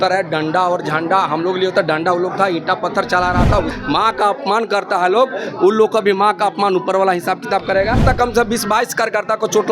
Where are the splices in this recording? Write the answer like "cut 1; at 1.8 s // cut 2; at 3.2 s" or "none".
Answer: cut 1; at 3.7 s // cut 2; at 8.0 s